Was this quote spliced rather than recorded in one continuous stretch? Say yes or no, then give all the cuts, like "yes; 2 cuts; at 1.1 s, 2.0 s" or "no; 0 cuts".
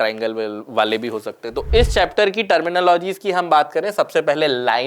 yes; 1 cut; at 1.7 s